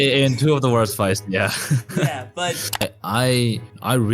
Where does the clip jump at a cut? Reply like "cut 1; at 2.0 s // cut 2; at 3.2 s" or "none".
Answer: cut 1; at 2.8 s